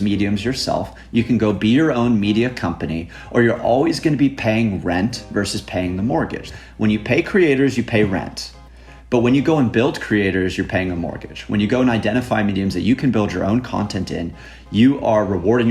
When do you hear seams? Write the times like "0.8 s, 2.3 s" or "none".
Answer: 6.4 s